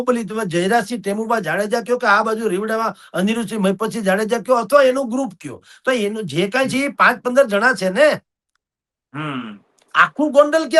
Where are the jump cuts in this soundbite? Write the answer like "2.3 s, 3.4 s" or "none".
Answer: none